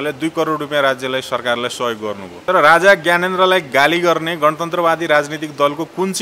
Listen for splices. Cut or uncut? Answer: cut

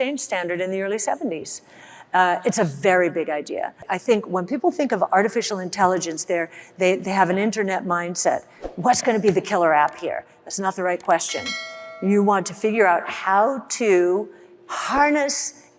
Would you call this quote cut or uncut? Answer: cut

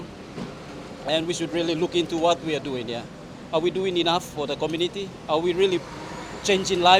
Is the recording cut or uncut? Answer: uncut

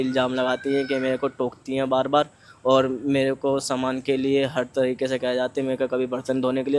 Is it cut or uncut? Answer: uncut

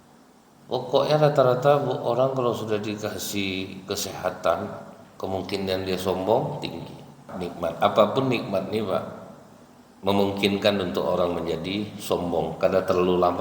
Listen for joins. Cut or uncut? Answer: cut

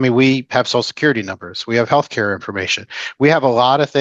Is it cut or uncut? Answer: uncut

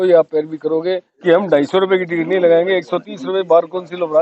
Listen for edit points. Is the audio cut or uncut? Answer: cut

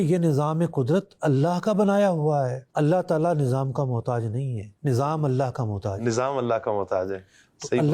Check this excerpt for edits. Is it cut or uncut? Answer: cut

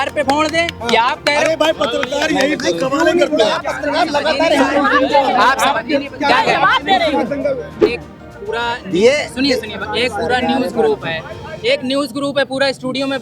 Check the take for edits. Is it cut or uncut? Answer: cut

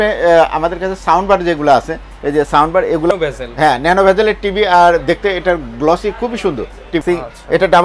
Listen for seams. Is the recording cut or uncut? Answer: cut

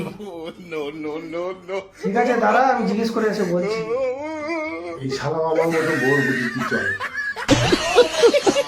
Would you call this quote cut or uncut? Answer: cut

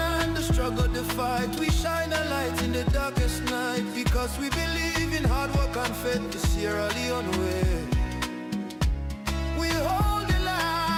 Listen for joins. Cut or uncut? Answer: uncut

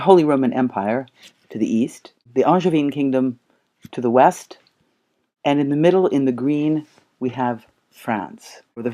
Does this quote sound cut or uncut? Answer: cut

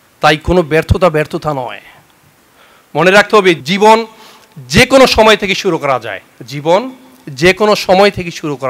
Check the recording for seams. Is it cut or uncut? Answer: cut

